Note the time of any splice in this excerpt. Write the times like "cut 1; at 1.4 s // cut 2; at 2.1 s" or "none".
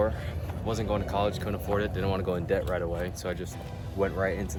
none